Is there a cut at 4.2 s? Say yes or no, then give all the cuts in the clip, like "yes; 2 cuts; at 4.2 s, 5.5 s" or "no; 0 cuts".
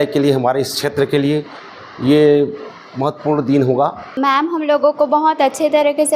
yes; 1 cut; at 4.2 s